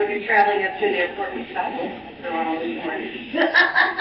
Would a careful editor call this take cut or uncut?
uncut